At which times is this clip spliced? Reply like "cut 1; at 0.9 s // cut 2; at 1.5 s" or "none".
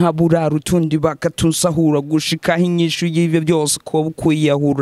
none